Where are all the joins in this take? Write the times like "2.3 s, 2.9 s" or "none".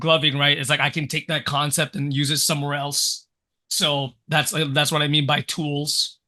none